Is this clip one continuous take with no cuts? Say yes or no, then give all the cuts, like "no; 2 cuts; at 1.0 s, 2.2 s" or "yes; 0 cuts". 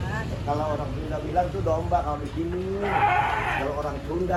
yes; 0 cuts